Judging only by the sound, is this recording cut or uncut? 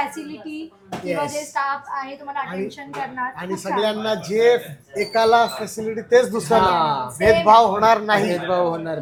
uncut